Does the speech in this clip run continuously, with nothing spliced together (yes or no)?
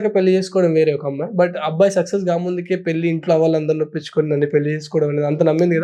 yes